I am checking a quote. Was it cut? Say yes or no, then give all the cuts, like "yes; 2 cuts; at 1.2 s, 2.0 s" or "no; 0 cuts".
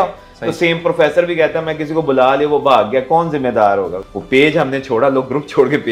yes; 1 cut; at 4.1 s